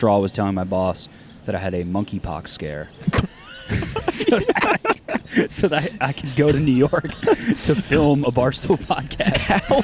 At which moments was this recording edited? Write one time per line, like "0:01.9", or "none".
none